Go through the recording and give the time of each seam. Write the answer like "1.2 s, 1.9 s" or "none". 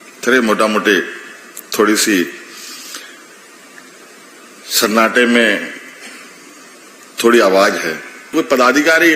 8.2 s